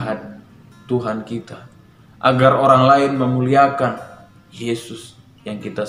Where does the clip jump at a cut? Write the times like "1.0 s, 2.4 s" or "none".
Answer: none